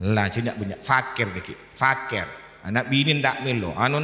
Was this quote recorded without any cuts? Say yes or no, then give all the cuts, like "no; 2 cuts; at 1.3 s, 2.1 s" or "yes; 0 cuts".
yes; 0 cuts